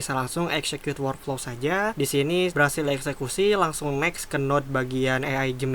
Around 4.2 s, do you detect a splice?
no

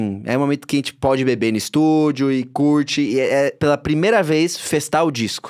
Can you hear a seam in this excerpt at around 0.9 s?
no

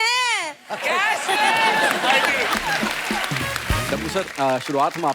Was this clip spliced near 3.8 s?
yes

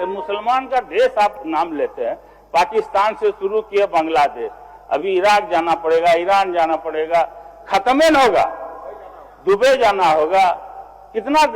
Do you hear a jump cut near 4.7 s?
no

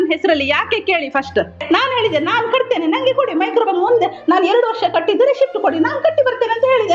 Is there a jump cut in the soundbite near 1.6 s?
yes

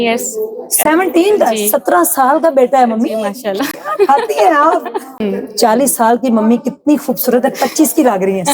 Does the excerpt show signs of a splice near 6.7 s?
no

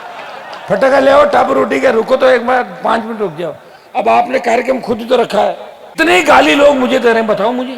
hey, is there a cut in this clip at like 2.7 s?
no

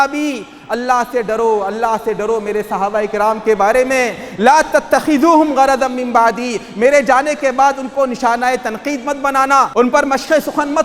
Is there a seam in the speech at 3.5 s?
no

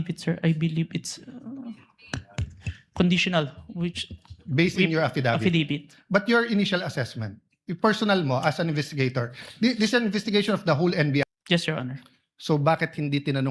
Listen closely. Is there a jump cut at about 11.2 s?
yes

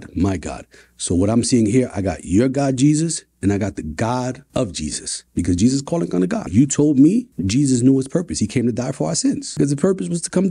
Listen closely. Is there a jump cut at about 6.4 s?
yes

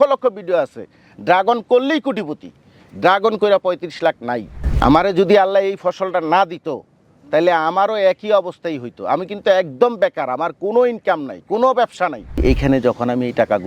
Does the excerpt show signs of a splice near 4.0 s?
no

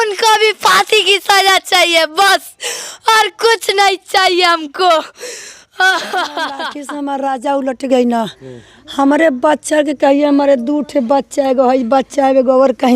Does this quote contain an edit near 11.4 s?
no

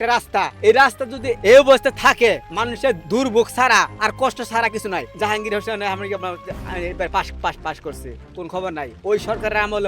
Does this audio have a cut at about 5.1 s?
yes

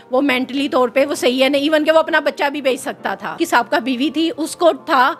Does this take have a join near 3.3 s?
yes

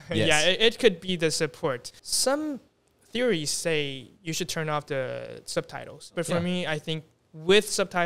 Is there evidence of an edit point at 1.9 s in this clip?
yes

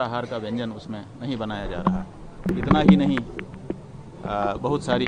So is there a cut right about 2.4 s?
yes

